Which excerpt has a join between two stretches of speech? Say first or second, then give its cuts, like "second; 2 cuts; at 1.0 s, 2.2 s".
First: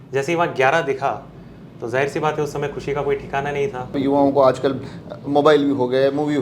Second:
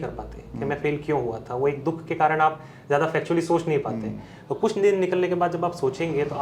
first; 1 cut; at 3.9 s